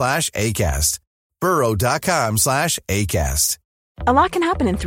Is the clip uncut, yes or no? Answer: no